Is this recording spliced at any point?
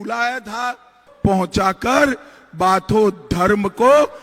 yes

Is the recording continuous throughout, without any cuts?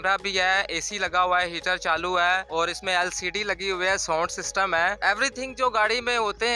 no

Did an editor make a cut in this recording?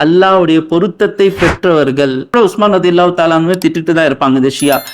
yes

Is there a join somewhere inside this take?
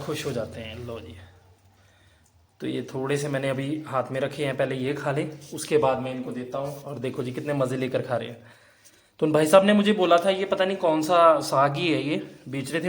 no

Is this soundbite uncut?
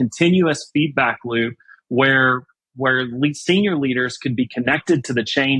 yes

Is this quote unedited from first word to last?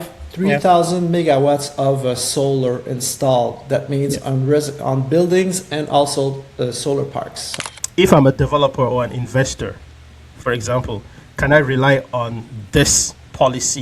no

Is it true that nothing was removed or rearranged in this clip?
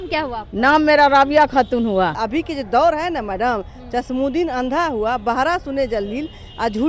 no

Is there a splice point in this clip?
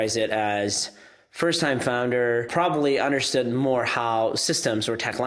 yes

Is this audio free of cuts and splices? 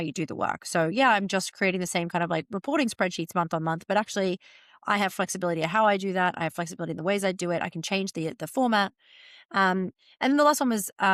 yes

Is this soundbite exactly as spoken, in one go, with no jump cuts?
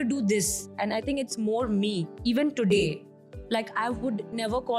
no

